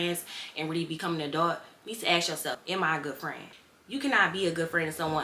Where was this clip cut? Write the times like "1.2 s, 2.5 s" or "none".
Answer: 2.6 s